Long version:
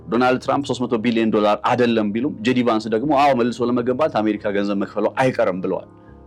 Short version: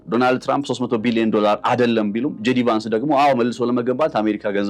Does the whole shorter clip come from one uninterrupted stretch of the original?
yes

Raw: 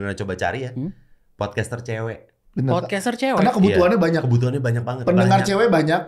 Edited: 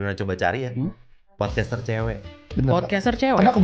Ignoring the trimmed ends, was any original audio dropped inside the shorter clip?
no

